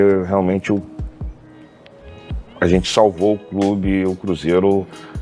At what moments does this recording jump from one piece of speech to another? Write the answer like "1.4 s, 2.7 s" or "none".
1.1 s, 2.6 s